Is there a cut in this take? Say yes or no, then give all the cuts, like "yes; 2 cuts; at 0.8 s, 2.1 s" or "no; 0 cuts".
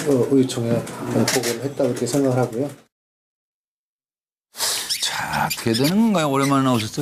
no; 0 cuts